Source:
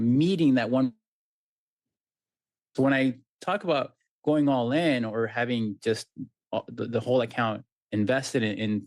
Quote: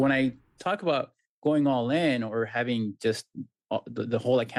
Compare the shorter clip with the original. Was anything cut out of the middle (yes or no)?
no